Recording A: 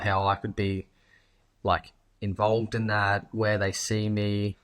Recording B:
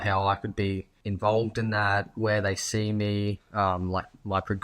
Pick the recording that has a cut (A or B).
B